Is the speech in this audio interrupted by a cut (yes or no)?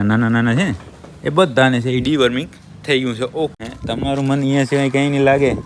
yes